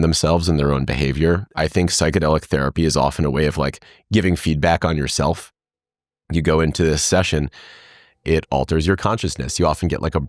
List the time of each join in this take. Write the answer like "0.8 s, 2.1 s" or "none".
1.5 s